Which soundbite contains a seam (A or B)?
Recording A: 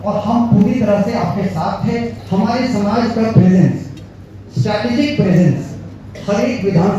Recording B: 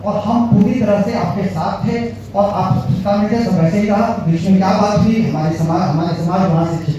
A